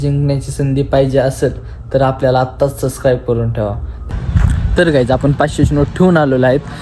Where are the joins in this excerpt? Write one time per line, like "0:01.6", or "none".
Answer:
0:03.9